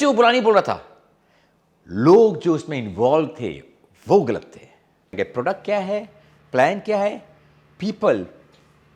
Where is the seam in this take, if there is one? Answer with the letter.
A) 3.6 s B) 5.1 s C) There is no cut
B